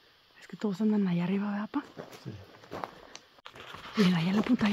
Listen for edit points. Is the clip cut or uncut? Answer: cut